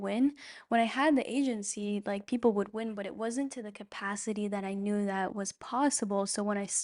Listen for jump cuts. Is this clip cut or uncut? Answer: uncut